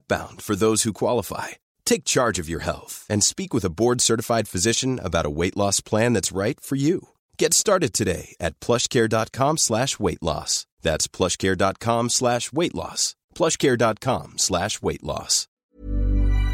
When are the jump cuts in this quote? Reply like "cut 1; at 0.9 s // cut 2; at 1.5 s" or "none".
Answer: cut 1; at 15.6 s

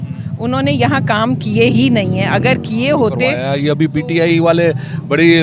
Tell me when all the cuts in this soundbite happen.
cut 1; at 3.5 s

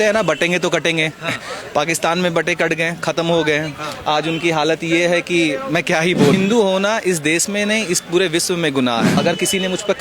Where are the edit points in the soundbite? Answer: cut 1; at 6.3 s // cut 2; at 9.2 s

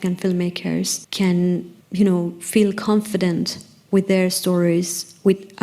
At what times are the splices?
cut 1; at 1.0 s // cut 2; at 1.8 s

